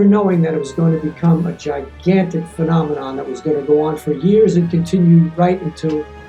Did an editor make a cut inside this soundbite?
no; 0 cuts

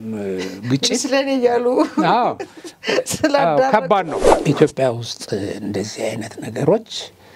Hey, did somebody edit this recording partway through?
yes; 1 cut; at 4.2 s

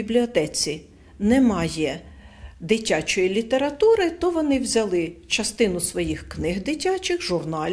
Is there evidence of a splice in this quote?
no; 0 cuts

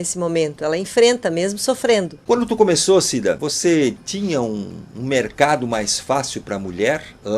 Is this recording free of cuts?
no; 2 cuts; at 2.1 s, 3.5 s

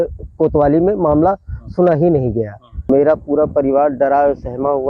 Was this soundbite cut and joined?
yes; 1 cut; at 2.7 s

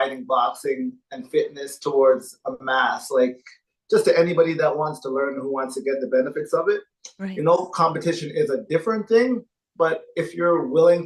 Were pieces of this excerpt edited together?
no; 0 cuts

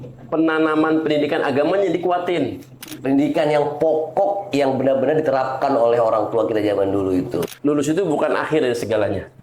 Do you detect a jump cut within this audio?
yes; 2 cuts; at 2.7 s, 7.5 s

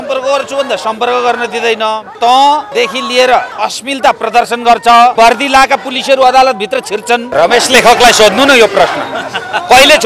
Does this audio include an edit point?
yes; 5 cuts; at 2.1 s, 2.7 s, 3.5 s, 5.1 s, 7.3 s

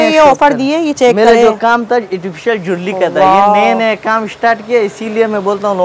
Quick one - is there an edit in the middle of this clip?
no; 0 cuts

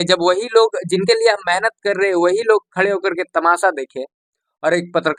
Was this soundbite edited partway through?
no; 0 cuts

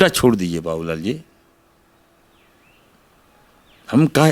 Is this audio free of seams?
yes; 0 cuts

